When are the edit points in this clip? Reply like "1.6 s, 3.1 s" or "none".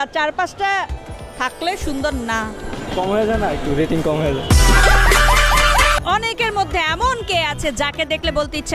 6.0 s